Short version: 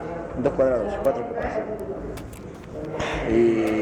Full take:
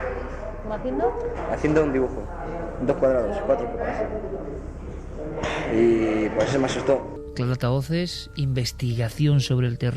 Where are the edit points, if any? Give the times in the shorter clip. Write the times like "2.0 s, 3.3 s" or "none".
none